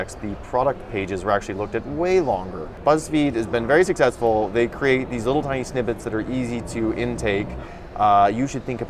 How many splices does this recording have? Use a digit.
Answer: 1